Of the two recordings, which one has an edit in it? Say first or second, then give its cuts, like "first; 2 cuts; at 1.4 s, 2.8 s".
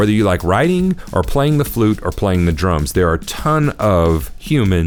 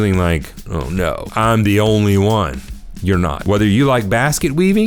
second; 2 cuts; at 1.2 s, 3.4 s